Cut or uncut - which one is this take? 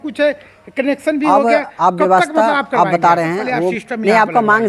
cut